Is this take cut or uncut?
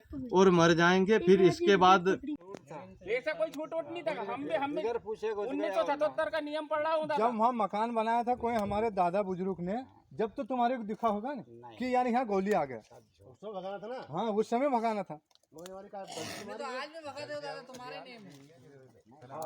cut